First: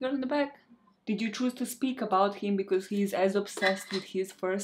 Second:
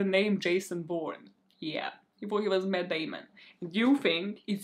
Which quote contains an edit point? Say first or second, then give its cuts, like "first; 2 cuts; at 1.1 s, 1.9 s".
first; 1 cut; at 0.9 s